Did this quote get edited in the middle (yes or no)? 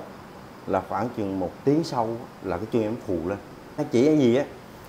yes